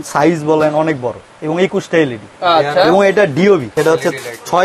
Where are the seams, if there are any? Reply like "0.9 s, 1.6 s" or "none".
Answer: 3.7 s